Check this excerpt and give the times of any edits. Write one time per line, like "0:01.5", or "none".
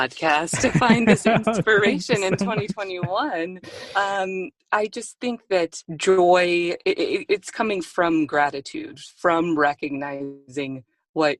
0:04.6
0:05.9